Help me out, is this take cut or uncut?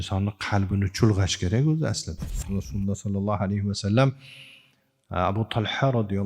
cut